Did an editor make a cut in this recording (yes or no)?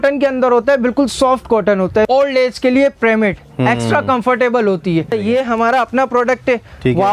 yes